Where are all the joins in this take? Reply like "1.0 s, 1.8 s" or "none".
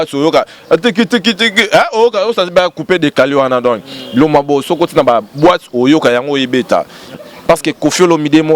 7.1 s